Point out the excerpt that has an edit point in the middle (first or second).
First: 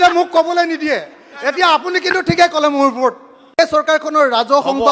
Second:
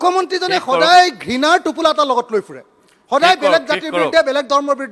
first